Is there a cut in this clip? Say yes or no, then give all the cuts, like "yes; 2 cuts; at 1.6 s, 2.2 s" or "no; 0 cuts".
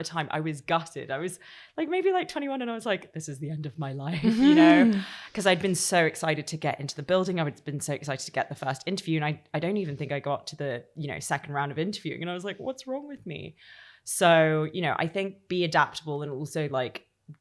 no; 0 cuts